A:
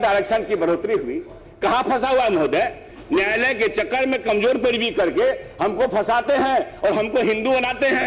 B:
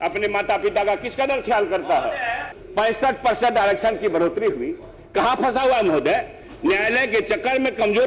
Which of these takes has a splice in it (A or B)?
B